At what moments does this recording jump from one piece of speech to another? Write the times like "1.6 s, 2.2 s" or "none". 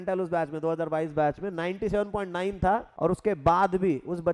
2.9 s